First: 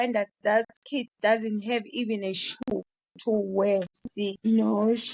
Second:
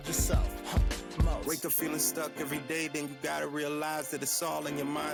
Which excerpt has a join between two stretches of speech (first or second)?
first